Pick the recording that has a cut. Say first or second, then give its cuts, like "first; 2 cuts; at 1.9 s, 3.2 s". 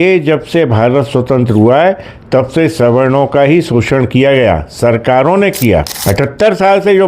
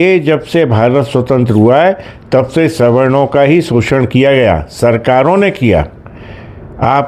first; 1 cut; at 6.0 s